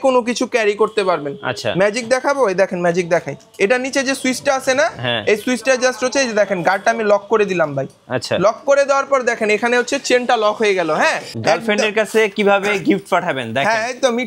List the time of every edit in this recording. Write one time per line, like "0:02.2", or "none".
0:03.4
0:11.3